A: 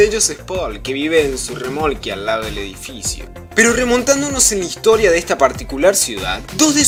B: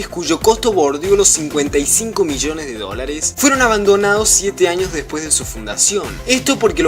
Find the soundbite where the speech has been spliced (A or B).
B